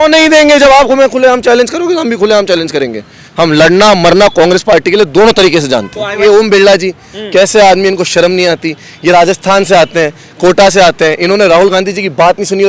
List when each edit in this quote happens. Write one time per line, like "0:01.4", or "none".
0:03.2
0:06.2